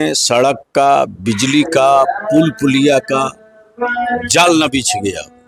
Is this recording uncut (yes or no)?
yes